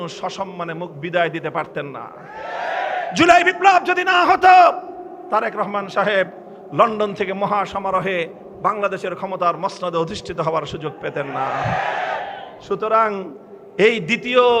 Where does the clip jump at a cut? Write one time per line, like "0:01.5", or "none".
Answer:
none